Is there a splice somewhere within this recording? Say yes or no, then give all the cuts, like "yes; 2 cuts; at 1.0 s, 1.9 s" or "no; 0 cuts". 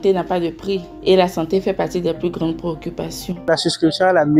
yes; 1 cut; at 3.4 s